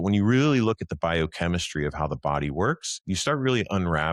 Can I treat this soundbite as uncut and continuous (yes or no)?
yes